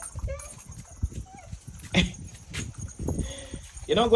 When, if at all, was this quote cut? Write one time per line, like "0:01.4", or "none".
none

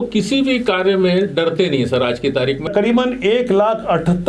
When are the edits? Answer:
0:02.7

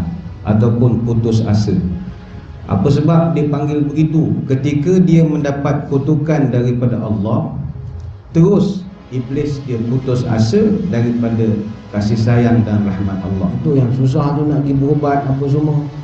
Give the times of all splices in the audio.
0:13.6

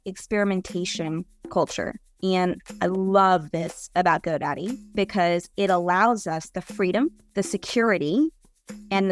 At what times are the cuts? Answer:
0:07.2

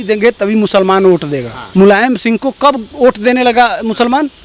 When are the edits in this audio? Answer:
none

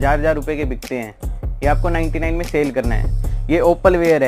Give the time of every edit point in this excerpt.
none

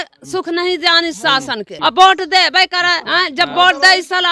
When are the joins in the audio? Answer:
0:01.7
0:03.0

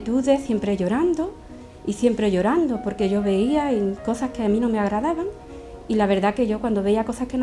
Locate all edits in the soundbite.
none

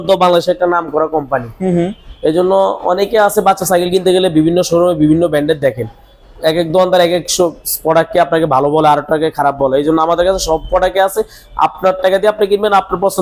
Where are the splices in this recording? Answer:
none

